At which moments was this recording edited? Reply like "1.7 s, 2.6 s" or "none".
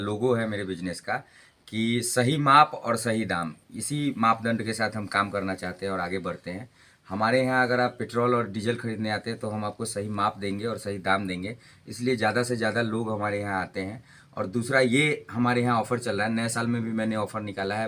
none